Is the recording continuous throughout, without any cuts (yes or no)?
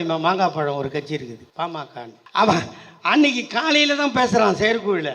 no